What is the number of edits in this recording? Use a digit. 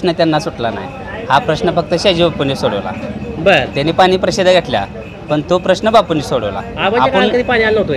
0